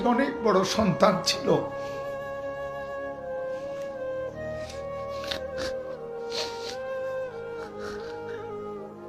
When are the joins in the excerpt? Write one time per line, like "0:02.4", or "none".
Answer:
0:01.6